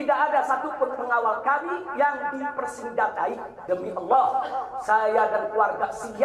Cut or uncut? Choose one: cut